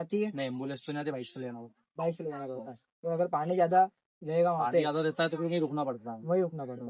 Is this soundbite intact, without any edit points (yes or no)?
yes